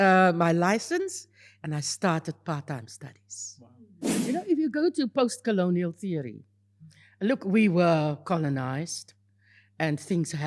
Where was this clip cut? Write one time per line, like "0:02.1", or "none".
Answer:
0:04.1

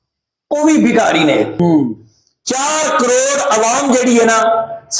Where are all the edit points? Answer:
0:01.5

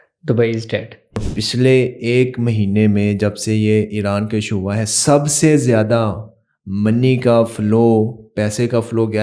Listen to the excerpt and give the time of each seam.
0:01.3

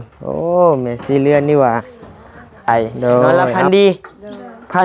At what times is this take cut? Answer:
0:03.5

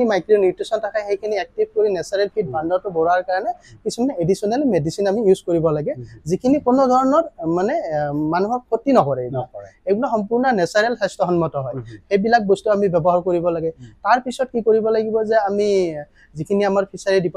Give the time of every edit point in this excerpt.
none

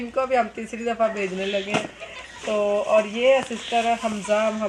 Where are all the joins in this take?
none

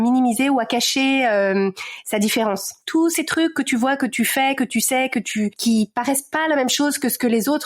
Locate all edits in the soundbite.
0:02.8
0:05.6

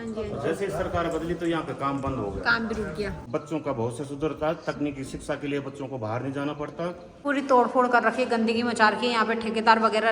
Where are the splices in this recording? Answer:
0:03.2
0:07.1

